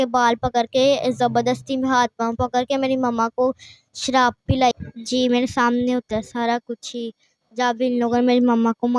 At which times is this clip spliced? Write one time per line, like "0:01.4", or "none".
0:04.8